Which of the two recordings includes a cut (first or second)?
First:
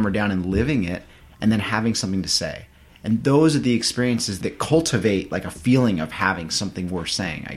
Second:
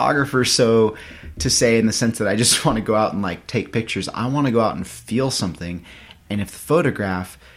first